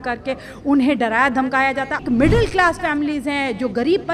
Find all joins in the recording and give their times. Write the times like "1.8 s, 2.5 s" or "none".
2.0 s